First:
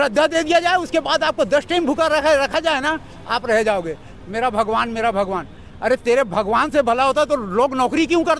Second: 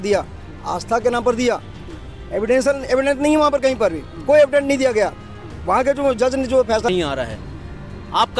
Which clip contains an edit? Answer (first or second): second